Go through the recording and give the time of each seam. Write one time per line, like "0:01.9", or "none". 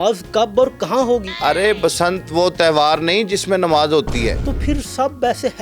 0:01.3
0:04.5